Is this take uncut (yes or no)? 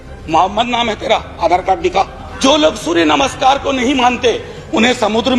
no